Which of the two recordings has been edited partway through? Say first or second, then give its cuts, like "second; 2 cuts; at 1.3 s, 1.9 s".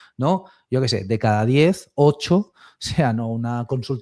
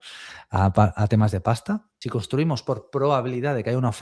second; 1 cut; at 1.9 s